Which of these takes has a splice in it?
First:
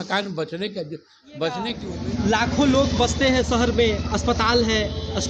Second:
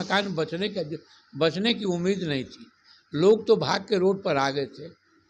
first; 1 cut; at 2.1 s

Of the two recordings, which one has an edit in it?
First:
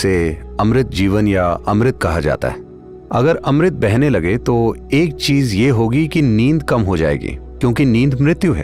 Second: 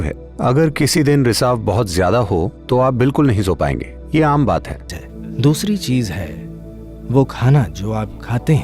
second; 1 cut; at 4.9 s

